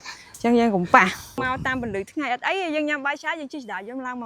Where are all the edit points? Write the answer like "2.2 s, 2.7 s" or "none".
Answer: 1.4 s